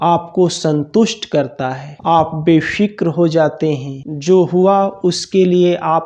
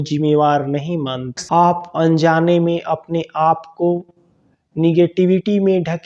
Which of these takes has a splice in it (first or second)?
second